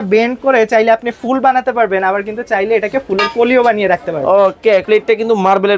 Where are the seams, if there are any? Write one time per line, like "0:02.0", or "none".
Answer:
0:04.8